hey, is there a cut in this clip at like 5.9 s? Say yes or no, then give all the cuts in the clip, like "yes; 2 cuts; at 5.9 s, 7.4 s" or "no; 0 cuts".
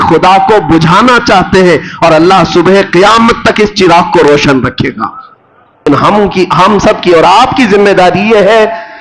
yes; 1 cut; at 5.9 s